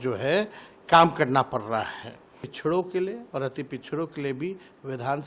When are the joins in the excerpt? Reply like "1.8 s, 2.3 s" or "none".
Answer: 2.5 s